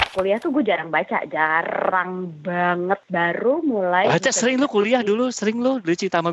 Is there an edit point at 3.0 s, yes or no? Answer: yes